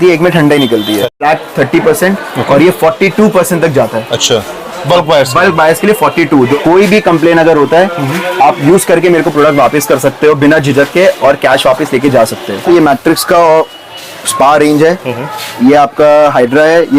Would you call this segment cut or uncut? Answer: cut